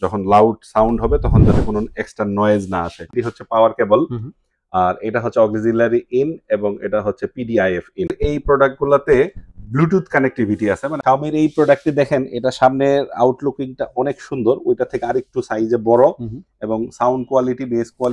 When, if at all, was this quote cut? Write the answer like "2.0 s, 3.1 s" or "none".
3.1 s, 8.1 s, 10.9 s